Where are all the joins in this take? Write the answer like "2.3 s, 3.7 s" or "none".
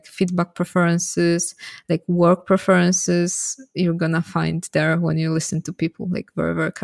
none